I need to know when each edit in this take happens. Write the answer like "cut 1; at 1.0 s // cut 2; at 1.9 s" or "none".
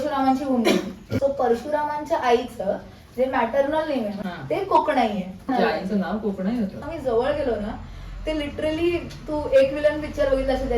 cut 1; at 1.0 s // cut 2; at 4.2 s // cut 3; at 5.5 s // cut 4; at 6.8 s